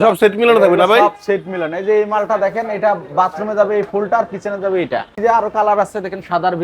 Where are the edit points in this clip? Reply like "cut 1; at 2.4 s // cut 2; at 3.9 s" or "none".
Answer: cut 1; at 5.2 s